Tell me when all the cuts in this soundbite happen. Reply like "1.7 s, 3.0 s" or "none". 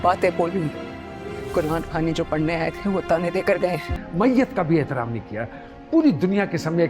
4.0 s